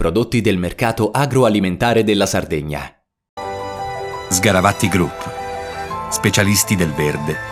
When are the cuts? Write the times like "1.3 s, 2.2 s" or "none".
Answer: none